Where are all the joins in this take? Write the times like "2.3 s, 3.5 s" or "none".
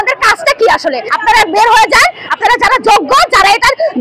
1.1 s